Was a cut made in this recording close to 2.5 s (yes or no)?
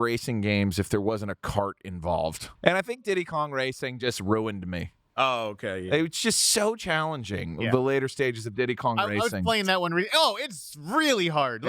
yes